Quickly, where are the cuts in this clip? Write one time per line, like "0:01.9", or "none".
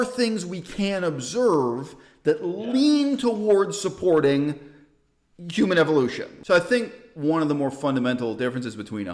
0:06.3